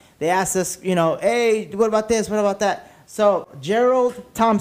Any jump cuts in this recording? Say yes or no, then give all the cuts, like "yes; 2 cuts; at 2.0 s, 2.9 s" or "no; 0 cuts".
yes; 1 cut; at 3.5 s